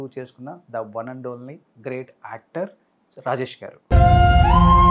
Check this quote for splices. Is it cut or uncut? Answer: uncut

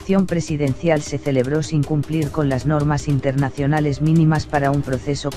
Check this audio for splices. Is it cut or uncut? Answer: cut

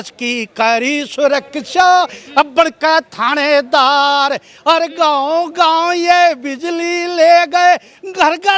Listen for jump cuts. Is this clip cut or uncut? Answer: uncut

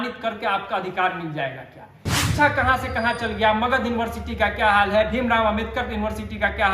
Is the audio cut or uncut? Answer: cut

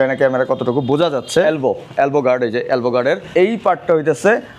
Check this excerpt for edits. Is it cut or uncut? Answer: cut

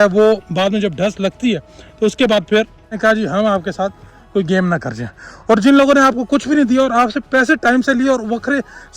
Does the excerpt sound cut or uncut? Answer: cut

